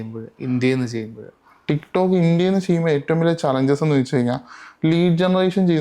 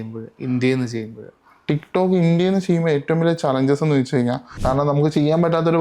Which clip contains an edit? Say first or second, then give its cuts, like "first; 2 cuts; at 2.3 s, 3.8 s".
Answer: second; 1 cut; at 4.5 s